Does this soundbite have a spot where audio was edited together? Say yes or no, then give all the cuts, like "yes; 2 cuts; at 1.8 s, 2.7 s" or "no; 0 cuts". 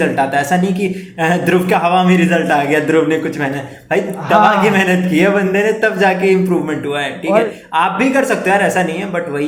no; 0 cuts